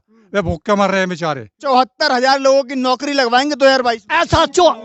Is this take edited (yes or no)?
yes